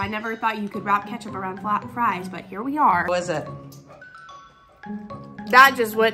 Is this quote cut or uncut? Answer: cut